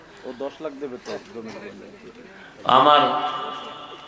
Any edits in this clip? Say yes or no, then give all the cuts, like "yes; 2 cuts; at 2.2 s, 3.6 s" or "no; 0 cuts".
no; 0 cuts